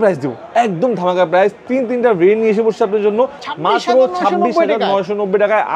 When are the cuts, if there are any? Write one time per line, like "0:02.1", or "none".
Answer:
0:03.4